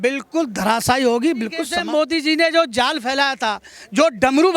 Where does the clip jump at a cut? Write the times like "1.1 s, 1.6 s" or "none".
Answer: 1.7 s